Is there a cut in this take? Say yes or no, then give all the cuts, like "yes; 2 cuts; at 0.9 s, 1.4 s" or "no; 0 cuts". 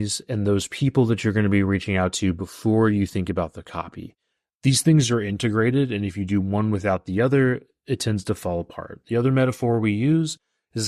no; 0 cuts